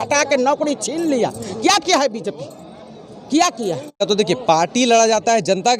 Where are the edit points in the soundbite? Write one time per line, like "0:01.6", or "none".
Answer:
0:04.0

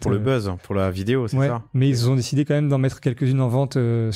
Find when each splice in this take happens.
none

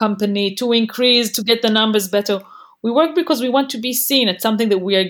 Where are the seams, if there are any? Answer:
none

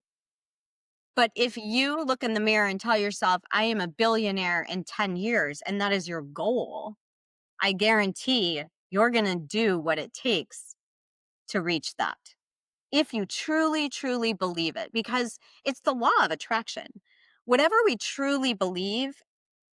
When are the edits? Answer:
none

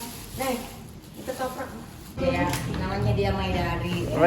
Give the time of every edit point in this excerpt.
0:02.3

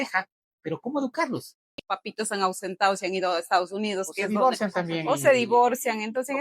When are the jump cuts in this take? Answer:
0:01.8

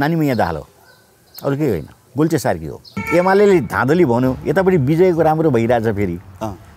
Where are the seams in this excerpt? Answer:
0:01.2
0:02.0
0:03.0

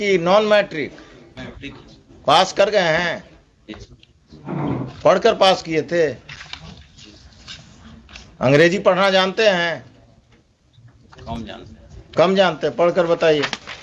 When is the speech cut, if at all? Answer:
none

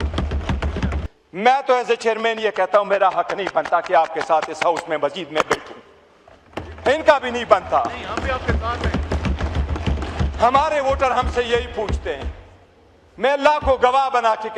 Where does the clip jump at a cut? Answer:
0:01.0

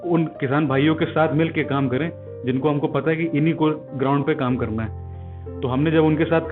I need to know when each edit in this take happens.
none

